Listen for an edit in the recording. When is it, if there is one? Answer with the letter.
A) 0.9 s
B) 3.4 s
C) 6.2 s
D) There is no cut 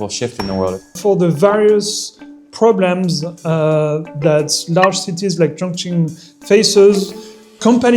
A